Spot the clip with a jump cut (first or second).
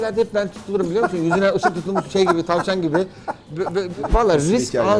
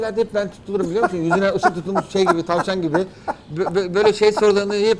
first